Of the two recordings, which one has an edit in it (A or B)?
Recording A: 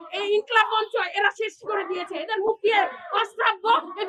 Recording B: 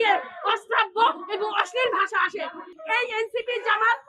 B